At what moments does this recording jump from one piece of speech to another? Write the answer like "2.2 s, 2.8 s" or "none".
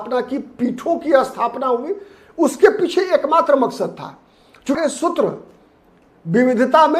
4.8 s

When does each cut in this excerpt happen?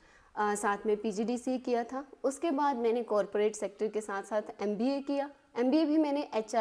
none

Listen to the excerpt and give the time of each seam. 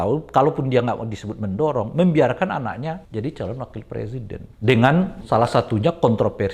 3.0 s, 4.4 s, 5.2 s

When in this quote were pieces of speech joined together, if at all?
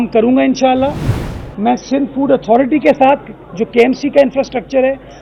none

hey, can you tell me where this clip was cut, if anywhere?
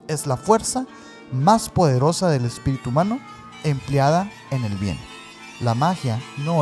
none

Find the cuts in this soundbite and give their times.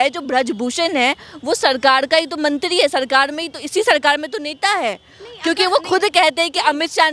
none

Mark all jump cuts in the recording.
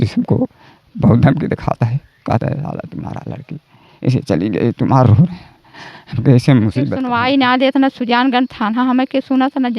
7.0 s

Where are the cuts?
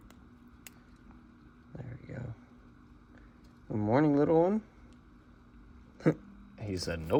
none

